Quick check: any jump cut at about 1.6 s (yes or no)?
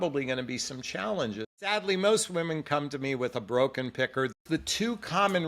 yes